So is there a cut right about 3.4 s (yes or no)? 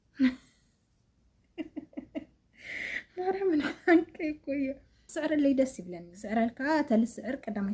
no